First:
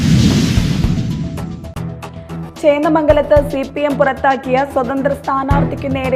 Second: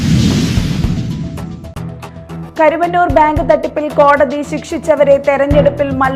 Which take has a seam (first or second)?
first